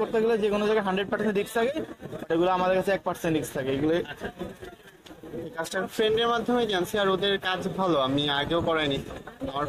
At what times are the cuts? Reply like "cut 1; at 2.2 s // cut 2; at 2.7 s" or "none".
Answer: cut 1; at 5.8 s